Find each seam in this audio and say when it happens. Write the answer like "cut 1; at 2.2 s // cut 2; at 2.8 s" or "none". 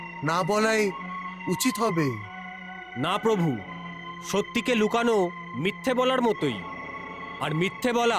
none